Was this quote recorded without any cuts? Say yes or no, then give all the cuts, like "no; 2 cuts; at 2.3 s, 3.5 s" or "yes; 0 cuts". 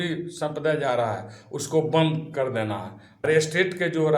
no; 1 cut; at 3.3 s